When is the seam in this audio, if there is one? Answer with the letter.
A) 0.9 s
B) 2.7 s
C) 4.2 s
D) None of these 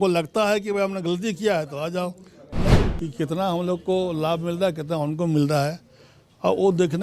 B